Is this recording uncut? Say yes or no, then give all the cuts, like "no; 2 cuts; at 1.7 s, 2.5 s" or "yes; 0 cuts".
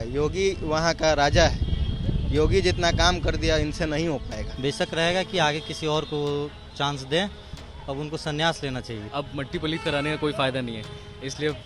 no; 2 cuts; at 4.4 s, 9.1 s